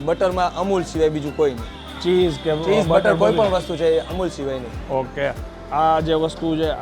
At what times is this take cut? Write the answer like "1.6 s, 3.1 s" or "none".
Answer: 5.5 s